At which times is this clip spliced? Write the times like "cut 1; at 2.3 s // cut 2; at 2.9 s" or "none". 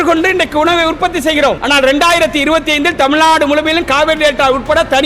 cut 1; at 1.6 s